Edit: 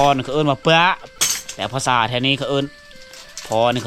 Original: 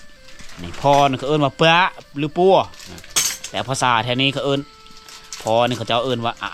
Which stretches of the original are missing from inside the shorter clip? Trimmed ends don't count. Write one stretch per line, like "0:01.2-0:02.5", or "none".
0:02.0-0:03.1